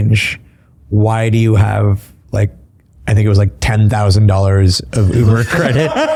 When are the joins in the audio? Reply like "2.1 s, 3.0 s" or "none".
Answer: none

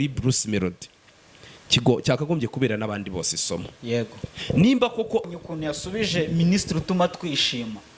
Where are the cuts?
5.4 s

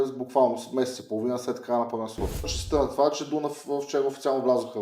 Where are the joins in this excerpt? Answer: 2.6 s

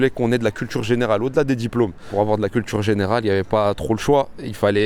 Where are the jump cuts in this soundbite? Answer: 2.0 s

